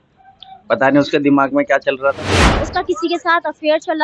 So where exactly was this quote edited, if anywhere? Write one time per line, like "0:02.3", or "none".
0:02.7

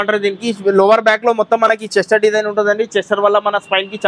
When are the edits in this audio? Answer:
none

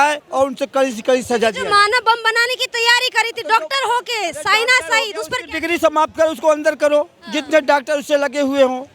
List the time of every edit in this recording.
none

